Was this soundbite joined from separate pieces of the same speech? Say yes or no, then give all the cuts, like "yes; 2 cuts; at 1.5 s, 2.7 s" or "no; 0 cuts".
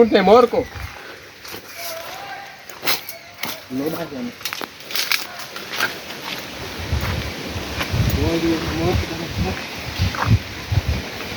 no; 0 cuts